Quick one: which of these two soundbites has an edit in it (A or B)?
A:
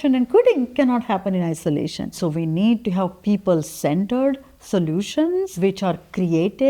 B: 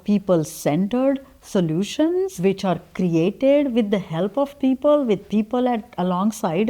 A